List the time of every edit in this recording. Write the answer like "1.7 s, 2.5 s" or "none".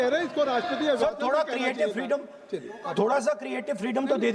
none